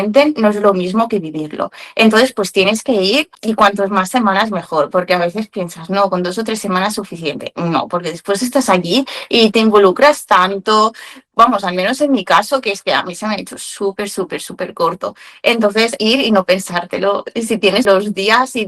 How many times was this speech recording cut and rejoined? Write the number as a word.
four